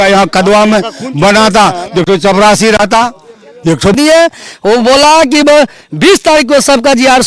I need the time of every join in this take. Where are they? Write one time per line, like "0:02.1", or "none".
0:03.9